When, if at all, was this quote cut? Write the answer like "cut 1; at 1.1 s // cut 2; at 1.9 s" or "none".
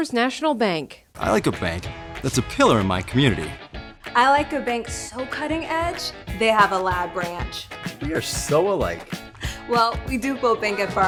none